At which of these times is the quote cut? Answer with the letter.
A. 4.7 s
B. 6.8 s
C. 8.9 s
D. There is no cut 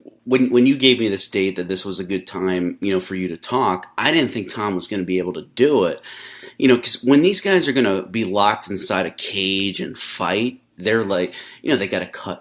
A